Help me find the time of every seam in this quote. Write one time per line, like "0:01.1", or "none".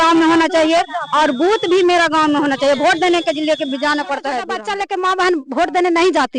0:04.6